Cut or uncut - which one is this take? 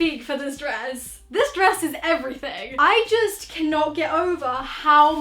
uncut